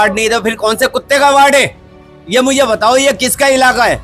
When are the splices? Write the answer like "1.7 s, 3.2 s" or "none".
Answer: none